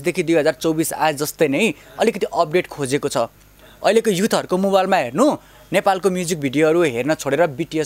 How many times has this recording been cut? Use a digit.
0